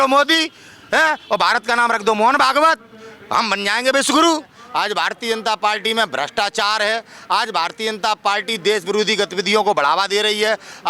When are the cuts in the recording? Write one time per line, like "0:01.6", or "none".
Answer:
0:04.6